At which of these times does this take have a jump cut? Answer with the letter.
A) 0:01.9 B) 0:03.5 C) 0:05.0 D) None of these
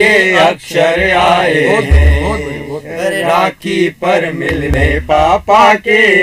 D